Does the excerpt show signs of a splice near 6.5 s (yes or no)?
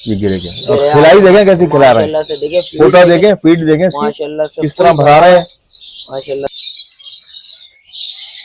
yes